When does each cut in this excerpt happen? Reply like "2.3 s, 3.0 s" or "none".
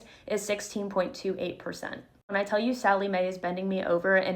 2.3 s